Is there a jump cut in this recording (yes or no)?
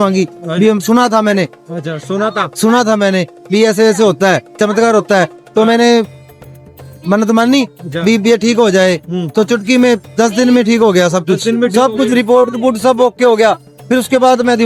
no